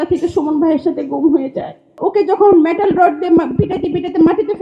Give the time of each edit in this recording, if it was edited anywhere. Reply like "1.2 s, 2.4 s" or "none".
1.9 s